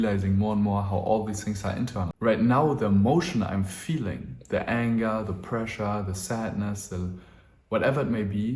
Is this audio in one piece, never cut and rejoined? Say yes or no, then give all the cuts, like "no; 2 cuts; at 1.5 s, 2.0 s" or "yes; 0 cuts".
no; 1 cut; at 2.1 s